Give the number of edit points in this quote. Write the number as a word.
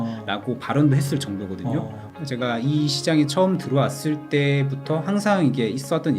one